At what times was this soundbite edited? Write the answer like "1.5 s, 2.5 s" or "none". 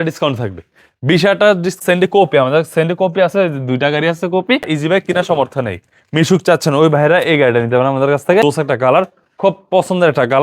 1.8 s, 4.7 s, 8.4 s